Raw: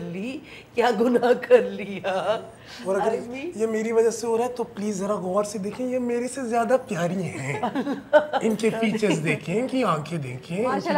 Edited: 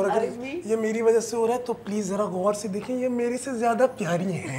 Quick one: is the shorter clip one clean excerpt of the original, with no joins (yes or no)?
yes